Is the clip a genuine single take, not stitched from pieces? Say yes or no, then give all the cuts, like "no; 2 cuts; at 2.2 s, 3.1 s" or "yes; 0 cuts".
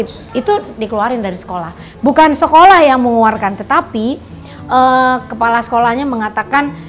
yes; 0 cuts